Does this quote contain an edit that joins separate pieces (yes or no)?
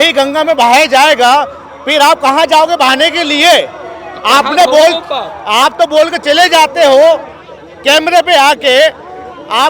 no